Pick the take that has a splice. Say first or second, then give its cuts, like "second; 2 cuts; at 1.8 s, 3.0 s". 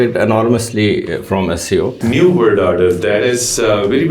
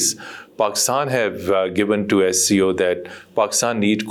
first; 1 cut; at 2.0 s